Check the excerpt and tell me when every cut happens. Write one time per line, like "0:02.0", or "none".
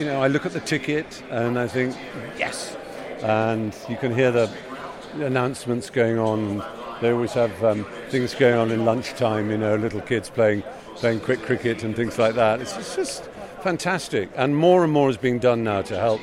none